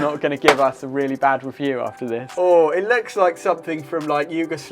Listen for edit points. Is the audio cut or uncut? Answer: cut